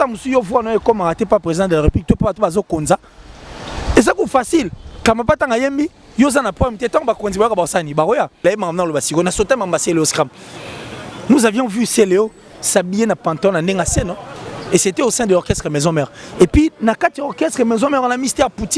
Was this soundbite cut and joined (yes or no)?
yes